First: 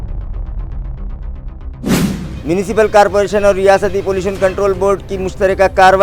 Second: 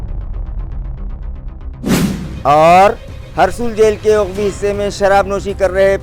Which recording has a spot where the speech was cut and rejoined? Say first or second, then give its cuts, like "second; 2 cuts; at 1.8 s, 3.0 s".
first; 1 cut; at 2.3 s